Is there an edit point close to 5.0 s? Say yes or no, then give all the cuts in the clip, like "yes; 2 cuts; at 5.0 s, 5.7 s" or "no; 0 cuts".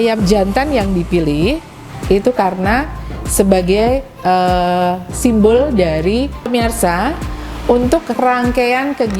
no; 1 cut; at 6.5 s